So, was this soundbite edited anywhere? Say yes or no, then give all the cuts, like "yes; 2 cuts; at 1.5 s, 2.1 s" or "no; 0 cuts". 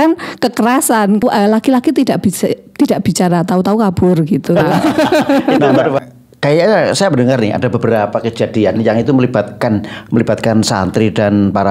yes; 2 cuts; at 1.2 s, 6.0 s